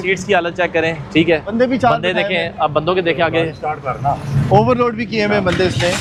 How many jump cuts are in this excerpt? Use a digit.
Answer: 0